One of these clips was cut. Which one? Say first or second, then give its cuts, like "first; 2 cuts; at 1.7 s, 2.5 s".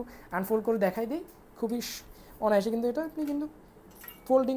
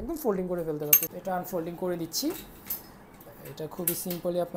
second; 1 cut; at 1.0 s